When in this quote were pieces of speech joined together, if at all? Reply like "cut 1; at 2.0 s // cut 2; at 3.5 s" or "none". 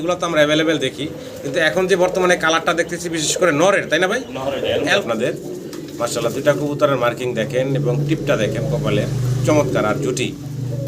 cut 1; at 5.0 s

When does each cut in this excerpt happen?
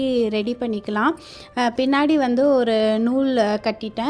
none

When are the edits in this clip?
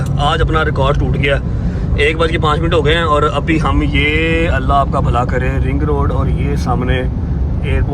none

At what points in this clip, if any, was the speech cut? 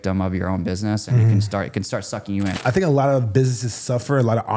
cut 1; at 2.6 s

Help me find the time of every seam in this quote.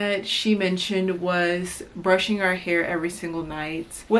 none

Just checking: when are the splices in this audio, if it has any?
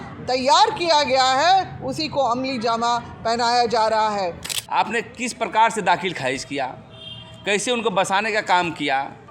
cut 1; at 4.4 s

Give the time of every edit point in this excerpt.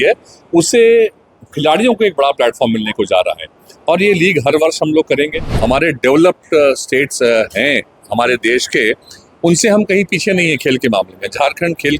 cut 1; at 5.4 s

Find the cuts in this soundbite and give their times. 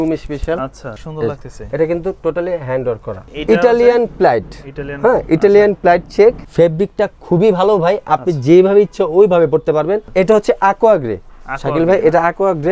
cut 1; at 1.0 s // cut 2; at 3.3 s // cut 3; at 6.4 s // cut 4; at 10.1 s

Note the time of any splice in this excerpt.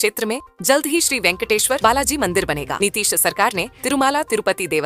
none

